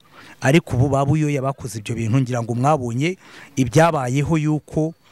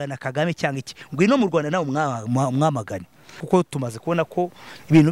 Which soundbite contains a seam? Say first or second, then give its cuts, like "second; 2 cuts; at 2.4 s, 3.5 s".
second; 1 cut; at 3.4 s